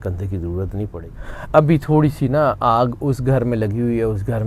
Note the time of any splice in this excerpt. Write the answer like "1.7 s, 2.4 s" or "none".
1.0 s